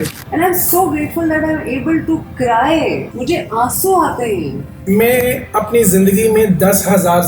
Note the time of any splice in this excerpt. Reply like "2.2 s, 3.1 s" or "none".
3.1 s, 4.7 s